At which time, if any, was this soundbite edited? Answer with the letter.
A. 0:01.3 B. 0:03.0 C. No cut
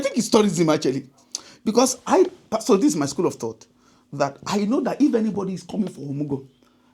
C